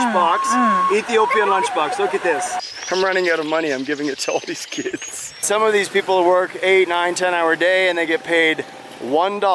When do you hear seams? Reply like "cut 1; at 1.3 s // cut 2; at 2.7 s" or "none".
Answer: cut 1; at 2.6 s // cut 2; at 5.4 s